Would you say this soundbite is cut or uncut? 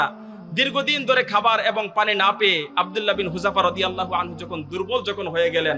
uncut